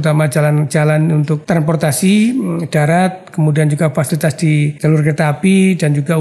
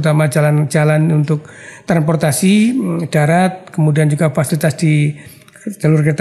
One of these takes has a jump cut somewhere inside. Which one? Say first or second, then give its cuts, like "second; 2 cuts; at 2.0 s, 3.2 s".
first; 2 cuts; at 1.4 s, 4.8 s